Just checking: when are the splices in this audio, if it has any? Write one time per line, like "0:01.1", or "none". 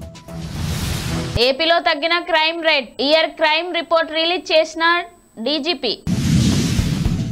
none